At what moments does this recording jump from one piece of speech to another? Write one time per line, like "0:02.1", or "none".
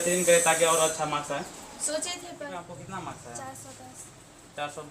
0:02.4